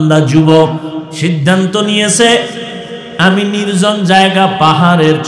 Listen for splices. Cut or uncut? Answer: cut